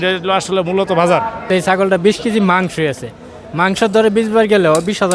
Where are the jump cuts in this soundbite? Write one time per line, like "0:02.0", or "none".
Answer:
0:01.5